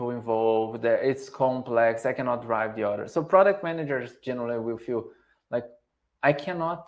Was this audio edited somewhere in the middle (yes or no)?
no